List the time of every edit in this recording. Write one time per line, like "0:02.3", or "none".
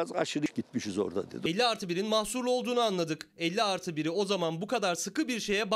0:01.3